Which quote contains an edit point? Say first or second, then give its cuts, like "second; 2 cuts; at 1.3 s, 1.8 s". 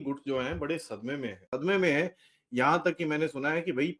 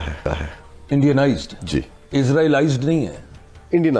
first; 1 cut; at 1.5 s